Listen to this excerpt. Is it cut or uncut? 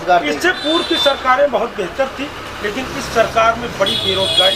uncut